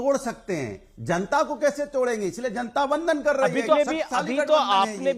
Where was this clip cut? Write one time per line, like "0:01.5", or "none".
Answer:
none